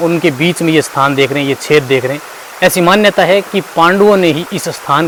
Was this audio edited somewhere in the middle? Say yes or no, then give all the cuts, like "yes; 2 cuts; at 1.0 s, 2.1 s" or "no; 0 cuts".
no; 0 cuts